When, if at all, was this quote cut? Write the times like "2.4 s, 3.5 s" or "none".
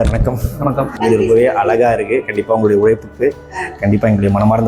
0.9 s